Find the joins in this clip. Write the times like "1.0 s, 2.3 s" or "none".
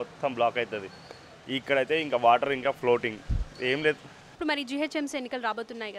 4.4 s